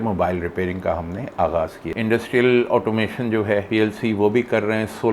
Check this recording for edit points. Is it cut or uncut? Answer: cut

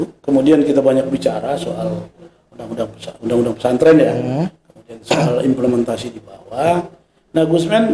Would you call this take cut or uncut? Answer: uncut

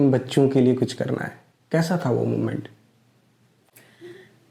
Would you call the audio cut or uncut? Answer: uncut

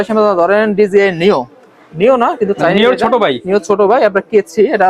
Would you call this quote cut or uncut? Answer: uncut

